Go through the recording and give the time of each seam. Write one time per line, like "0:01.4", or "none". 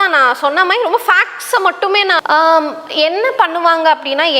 0:02.2